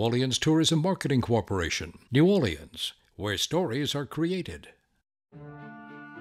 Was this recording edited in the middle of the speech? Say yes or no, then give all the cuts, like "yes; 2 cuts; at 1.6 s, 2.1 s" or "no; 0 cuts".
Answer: yes; 1 cut; at 5.2 s